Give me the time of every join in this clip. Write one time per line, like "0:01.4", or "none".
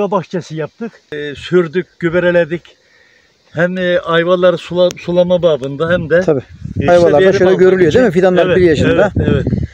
0:01.0